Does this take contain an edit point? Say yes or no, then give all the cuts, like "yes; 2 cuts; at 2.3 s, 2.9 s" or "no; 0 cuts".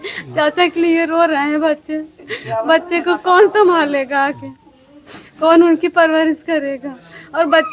no; 0 cuts